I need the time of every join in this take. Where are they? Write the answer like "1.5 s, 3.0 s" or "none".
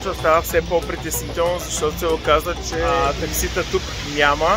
3.0 s